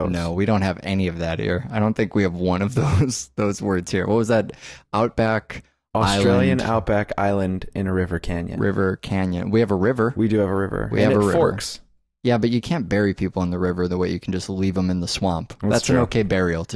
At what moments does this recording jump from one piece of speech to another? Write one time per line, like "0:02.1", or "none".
0:08.8